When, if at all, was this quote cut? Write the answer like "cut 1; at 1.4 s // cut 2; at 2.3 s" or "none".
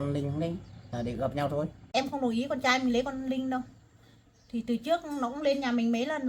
cut 1; at 1.8 s